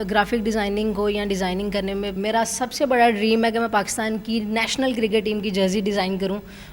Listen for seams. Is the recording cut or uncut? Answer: cut